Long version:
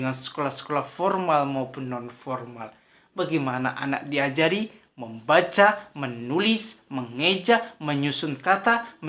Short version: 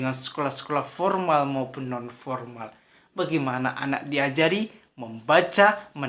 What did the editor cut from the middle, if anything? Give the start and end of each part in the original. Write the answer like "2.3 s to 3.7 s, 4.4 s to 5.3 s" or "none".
none